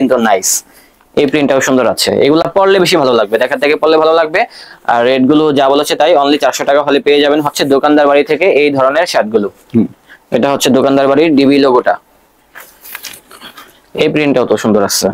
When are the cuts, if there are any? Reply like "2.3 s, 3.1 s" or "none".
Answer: none